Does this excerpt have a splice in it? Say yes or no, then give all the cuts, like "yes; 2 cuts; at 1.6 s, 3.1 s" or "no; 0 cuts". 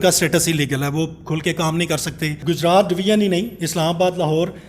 yes; 1 cut; at 2.4 s